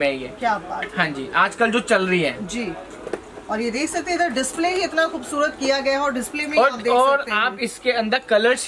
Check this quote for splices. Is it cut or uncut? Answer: uncut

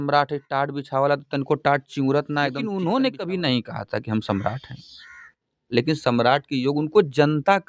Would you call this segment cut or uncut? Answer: cut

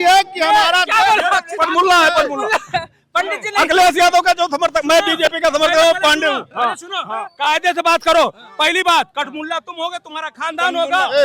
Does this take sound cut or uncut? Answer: uncut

